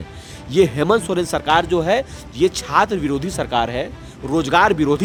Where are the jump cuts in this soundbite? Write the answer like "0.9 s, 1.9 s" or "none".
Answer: none